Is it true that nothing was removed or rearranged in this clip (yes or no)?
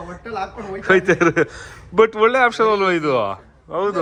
yes